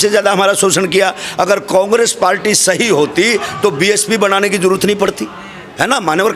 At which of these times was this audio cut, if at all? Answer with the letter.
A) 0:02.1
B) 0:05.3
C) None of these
C